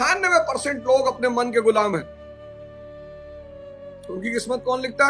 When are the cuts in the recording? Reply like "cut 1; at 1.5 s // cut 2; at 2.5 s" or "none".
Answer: none